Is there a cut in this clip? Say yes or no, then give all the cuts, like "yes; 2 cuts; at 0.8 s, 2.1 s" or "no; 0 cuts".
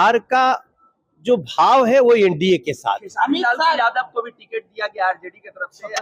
no; 0 cuts